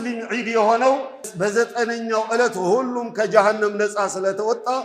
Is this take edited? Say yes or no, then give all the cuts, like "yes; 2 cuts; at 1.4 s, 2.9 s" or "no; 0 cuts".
yes; 1 cut; at 1.3 s